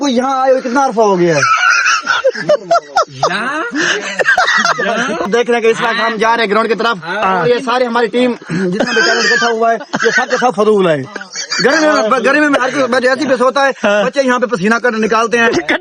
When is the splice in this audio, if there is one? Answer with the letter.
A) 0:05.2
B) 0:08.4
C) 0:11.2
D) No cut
A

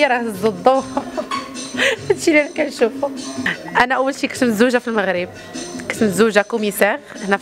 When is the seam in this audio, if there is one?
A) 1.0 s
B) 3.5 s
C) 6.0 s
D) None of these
B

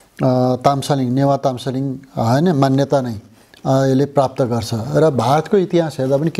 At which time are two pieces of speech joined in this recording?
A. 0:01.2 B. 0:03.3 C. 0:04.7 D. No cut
D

